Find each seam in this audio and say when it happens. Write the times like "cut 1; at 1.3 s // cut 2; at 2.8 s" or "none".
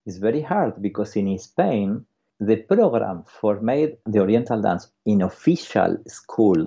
cut 1; at 2.3 s // cut 2; at 4.1 s